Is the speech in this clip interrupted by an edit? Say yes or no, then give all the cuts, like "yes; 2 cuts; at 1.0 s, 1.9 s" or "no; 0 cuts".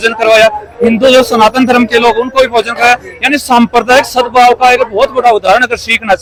no; 0 cuts